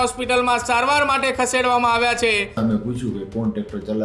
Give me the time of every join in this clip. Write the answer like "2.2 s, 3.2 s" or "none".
2.6 s